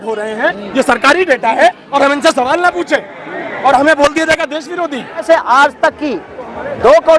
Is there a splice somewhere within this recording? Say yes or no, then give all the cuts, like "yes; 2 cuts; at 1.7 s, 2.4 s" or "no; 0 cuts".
yes; 1 cut; at 5.2 s